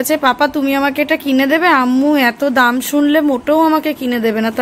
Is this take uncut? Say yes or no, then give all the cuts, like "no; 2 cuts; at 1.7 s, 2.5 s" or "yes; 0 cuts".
yes; 0 cuts